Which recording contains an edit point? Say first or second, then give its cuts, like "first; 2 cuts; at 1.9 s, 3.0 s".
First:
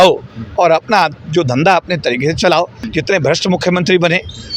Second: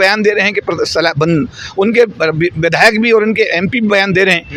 first; 1 cut; at 2.8 s